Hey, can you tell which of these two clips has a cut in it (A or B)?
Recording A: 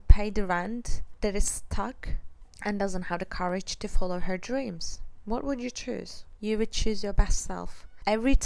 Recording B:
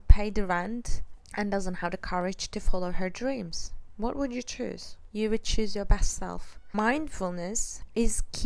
B